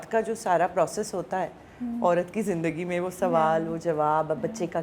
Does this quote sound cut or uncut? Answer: uncut